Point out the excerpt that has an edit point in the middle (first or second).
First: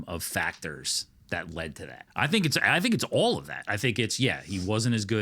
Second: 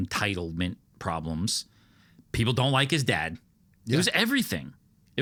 first